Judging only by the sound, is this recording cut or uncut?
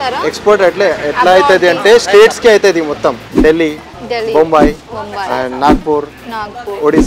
cut